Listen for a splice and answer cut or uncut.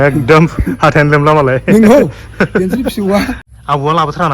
cut